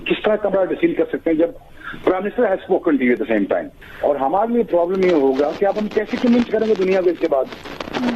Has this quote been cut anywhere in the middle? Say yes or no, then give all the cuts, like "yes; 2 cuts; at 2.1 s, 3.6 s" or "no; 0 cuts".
yes; 1 cut; at 3.8 s